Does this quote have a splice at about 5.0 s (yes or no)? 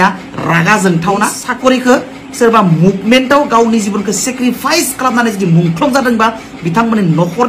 no